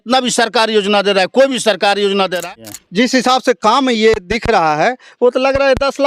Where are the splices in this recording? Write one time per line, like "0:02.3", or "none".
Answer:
0:02.6